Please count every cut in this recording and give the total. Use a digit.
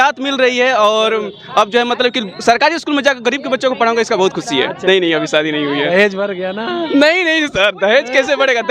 1